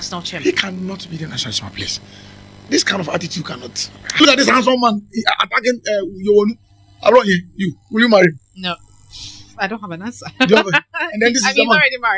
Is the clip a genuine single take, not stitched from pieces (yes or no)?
no